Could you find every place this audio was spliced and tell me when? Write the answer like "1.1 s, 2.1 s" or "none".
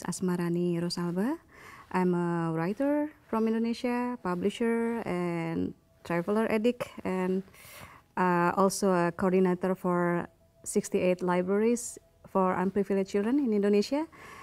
10.7 s